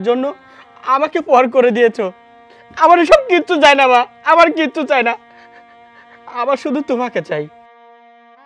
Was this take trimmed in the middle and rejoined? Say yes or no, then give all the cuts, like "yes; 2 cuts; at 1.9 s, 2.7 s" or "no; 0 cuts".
no; 0 cuts